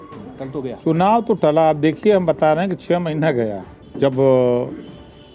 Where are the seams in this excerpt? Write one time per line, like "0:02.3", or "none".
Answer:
0:03.8